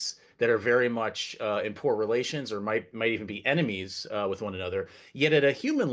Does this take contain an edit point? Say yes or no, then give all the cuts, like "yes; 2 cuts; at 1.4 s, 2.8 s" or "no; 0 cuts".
no; 0 cuts